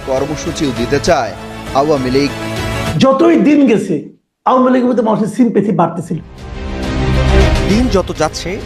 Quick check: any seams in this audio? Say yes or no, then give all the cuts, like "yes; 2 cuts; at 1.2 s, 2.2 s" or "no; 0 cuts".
yes; 2 cuts; at 3.0 s, 7.4 s